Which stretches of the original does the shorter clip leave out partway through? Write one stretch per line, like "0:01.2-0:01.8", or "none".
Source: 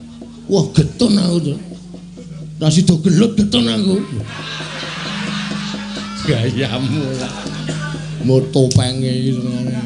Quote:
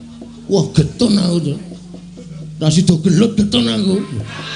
none

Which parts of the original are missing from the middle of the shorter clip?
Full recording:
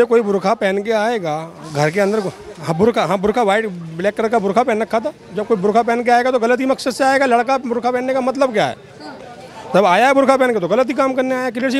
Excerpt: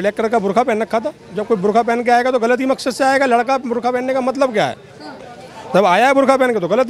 none

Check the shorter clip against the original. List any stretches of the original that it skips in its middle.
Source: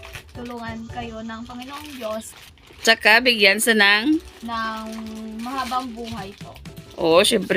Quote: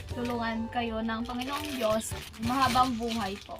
0:02.5-0:05.3

